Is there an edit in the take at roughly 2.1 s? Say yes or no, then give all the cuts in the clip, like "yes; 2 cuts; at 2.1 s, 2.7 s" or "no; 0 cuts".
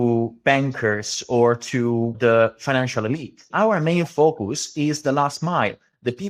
yes; 2 cuts; at 2.1 s, 3.4 s